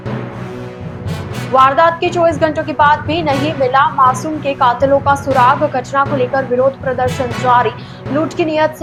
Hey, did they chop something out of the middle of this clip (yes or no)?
no